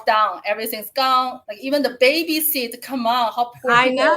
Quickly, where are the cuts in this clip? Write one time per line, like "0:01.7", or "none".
0:01.5